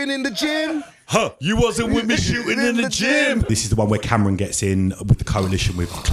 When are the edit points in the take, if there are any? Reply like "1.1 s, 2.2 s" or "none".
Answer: 3.5 s